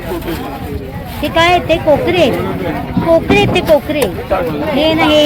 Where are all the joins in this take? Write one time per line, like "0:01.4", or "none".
none